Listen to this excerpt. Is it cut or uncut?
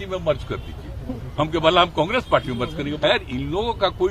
cut